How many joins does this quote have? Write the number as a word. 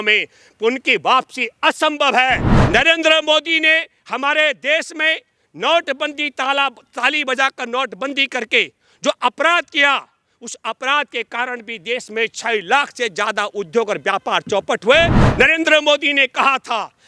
two